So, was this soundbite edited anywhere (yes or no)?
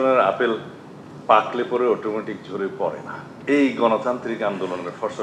yes